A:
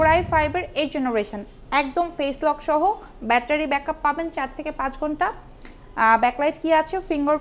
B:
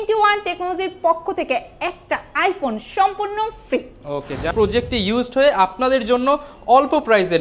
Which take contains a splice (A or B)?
B